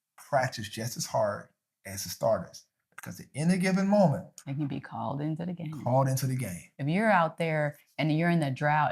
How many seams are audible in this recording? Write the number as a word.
one